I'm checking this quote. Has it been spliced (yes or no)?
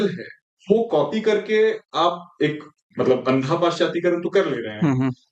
no